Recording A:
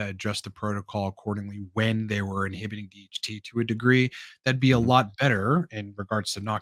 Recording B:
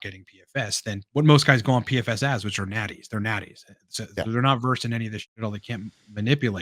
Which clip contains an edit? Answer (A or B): B